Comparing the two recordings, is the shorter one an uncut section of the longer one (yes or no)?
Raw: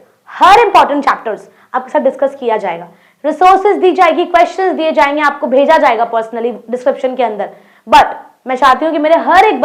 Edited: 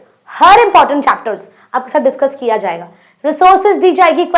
yes